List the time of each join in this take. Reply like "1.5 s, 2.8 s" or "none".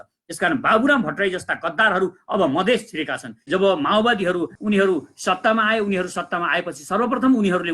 3.5 s, 4.5 s